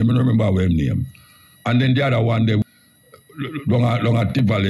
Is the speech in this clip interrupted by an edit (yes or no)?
yes